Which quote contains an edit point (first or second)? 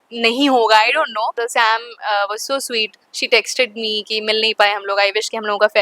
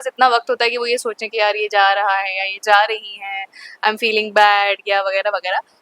first